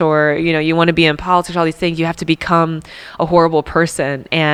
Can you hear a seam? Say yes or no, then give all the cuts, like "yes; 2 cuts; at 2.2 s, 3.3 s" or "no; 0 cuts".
no; 0 cuts